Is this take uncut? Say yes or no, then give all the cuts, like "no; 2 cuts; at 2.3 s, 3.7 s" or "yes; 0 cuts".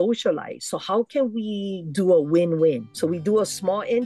yes; 0 cuts